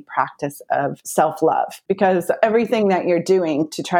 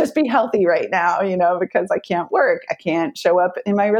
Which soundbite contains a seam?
first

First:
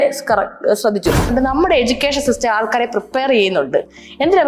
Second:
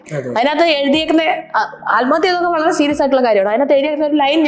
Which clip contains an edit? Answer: first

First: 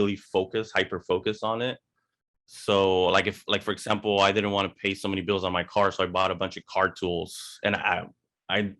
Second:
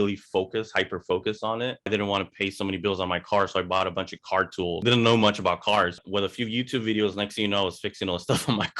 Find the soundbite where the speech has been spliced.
second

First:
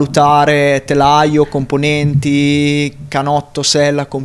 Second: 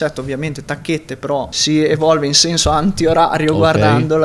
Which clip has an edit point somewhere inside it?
second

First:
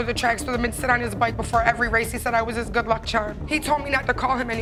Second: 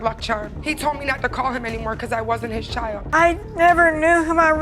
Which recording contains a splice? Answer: second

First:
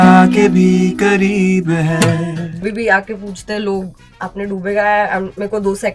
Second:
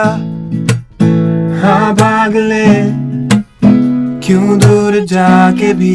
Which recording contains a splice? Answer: first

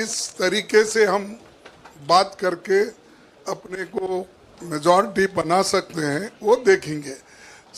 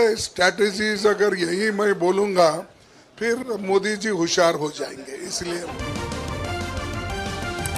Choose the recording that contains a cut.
second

